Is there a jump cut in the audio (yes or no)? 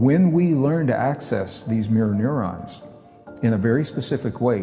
no